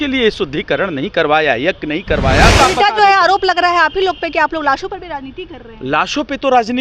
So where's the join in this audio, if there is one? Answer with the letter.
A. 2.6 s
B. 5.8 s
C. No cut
A